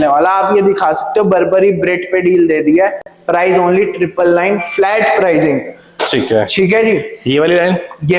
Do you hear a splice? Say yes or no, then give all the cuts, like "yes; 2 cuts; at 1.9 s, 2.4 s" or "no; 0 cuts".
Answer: no; 0 cuts